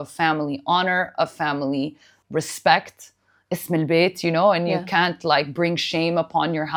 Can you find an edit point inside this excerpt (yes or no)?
no